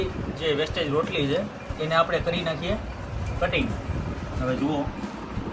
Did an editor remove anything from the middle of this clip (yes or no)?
no